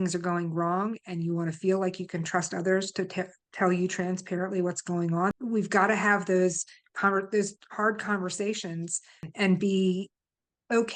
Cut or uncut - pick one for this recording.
cut